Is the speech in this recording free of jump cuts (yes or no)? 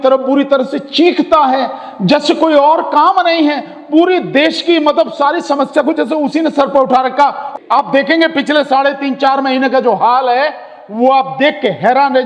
no